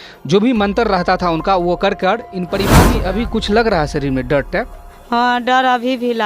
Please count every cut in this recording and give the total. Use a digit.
1